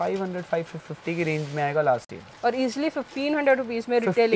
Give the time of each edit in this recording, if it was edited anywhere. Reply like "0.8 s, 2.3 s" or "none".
none